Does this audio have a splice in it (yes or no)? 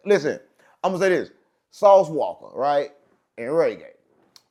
no